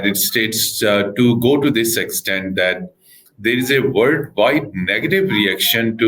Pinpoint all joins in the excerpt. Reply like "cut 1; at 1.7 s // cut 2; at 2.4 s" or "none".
none